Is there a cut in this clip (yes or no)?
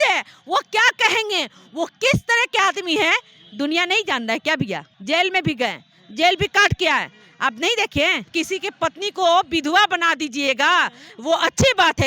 yes